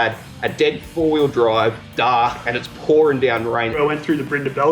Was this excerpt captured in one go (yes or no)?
no